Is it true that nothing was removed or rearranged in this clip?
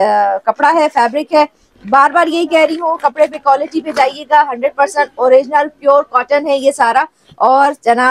yes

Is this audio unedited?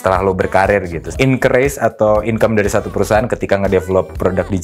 no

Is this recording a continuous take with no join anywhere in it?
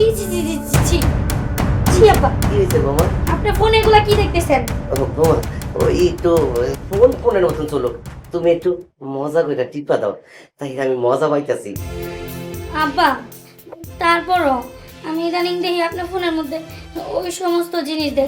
yes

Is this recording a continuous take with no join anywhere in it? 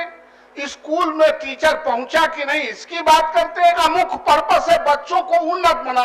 no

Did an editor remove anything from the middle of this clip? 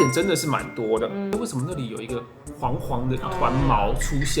yes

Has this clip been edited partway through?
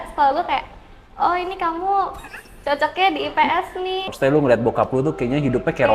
yes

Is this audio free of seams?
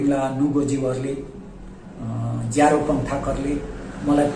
yes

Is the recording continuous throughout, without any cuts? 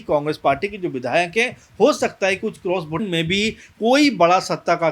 no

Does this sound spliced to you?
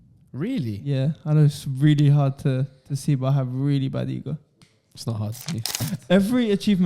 yes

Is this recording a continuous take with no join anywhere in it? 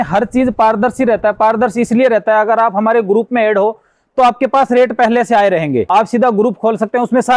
no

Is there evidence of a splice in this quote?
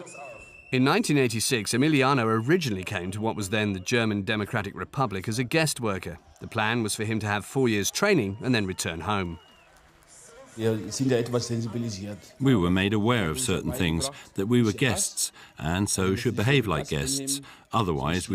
no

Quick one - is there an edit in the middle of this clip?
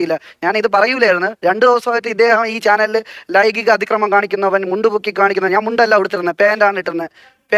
no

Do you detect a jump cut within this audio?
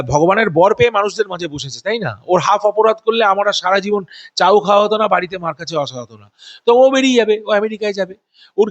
no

